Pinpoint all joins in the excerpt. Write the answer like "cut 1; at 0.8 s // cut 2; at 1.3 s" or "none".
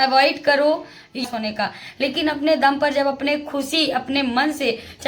cut 1; at 1.3 s

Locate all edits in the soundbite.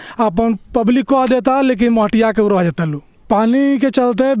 cut 1; at 3.1 s

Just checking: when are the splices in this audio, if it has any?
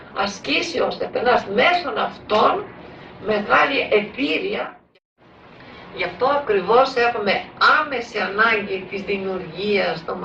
cut 1; at 4.7 s

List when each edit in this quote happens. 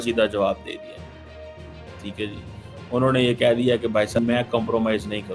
cut 1; at 4.2 s

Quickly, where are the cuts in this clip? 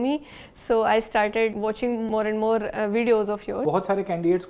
cut 1; at 1.7 s // cut 2; at 3.6 s

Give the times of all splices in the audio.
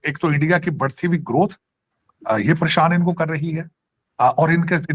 none

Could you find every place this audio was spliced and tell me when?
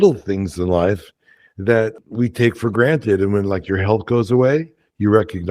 cut 1; at 2.0 s

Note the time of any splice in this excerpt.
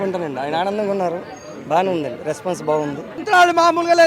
cut 1; at 3.2 s

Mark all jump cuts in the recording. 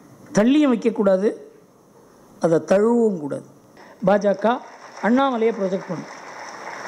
cut 1; at 3.7 s

